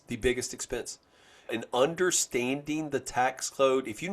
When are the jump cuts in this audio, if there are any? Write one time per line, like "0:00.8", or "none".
0:01.4